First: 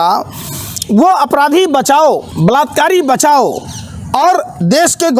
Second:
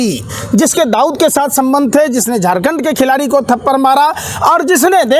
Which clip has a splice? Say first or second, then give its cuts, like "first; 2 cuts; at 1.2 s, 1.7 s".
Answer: first; 1 cut; at 2.3 s